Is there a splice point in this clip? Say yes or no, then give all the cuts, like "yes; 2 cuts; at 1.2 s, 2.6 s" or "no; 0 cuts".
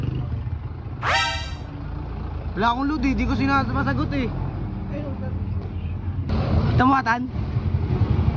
yes; 1 cut; at 6.3 s